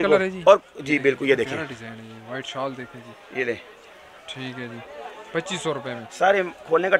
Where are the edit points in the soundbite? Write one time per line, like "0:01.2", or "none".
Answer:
none